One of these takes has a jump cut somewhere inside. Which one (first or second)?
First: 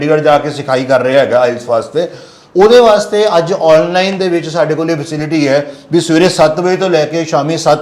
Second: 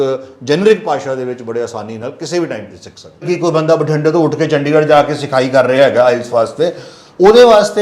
second